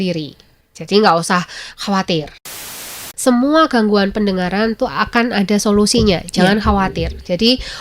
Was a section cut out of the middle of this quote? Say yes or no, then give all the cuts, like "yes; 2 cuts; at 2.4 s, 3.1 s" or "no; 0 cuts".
yes; 1 cut; at 2.8 s